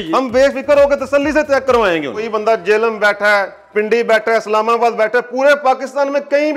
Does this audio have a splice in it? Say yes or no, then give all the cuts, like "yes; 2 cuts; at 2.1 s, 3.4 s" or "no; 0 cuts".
yes; 1 cut; at 2.3 s